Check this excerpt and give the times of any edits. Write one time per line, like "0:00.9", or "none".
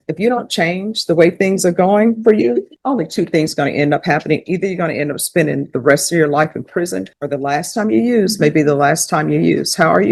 none